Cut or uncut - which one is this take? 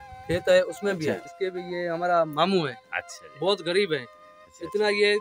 uncut